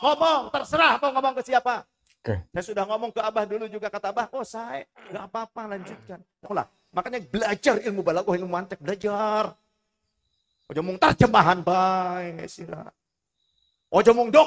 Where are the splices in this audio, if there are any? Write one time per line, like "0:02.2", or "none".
0:06.5